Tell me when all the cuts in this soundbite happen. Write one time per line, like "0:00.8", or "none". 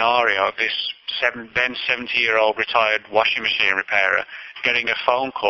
none